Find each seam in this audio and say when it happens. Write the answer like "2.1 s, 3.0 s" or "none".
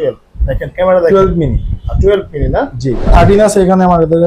3.1 s